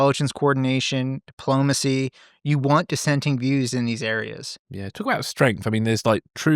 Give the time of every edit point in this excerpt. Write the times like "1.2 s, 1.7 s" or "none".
4.6 s

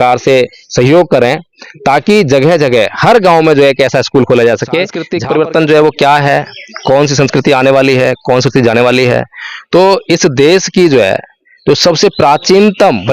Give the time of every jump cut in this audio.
5.1 s

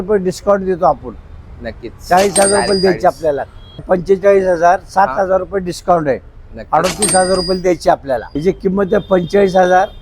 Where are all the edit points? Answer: 3.8 s, 8.3 s

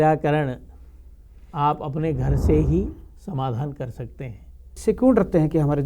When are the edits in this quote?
4.7 s

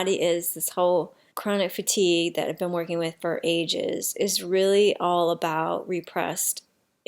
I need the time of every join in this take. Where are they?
1.2 s

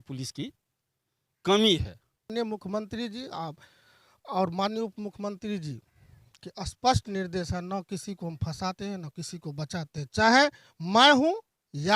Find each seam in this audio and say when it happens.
2.3 s

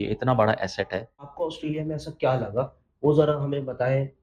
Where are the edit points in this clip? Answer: 1.3 s

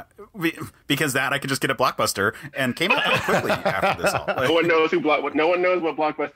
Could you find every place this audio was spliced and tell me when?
2.5 s

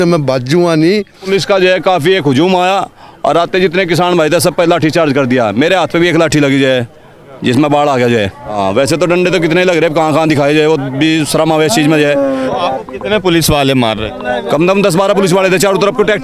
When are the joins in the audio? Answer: 1.2 s, 8.4 s, 12.5 s

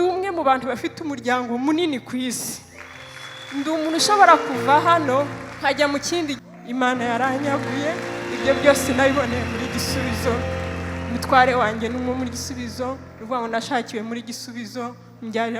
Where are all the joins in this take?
6.4 s

